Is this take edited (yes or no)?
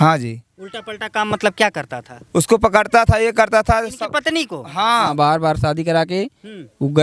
yes